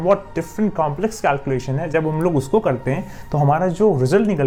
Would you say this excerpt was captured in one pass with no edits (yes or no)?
yes